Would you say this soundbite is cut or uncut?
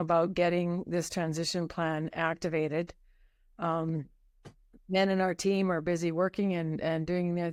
uncut